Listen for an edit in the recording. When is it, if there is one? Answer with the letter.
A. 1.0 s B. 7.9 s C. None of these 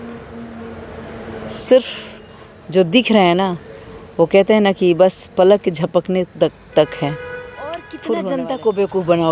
B